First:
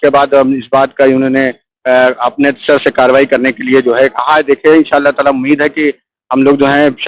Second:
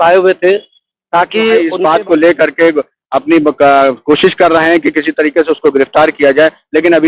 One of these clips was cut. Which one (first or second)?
second